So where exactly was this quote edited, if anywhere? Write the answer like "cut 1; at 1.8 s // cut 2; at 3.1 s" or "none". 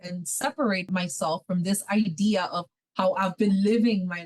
cut 1; at 0.9 s // cut 2; at 2.7 s